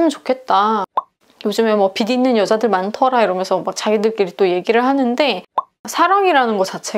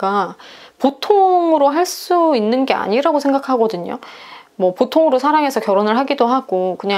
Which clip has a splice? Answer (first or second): first